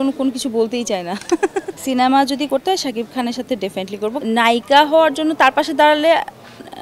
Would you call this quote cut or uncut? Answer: cut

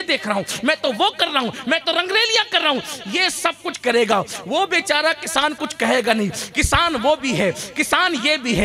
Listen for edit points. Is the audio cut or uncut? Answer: uncut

